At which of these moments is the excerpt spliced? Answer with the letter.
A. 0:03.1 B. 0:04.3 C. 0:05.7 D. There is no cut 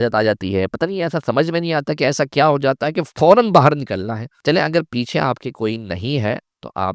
D